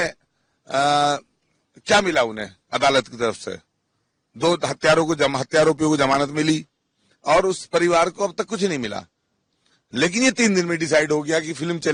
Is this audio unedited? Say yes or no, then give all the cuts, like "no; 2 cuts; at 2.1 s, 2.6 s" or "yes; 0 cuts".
yes; 0 cuts